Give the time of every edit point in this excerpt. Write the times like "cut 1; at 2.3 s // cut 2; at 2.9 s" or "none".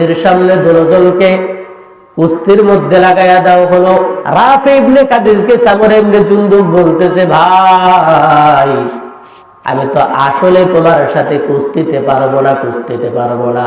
cut 1; at 4.2 s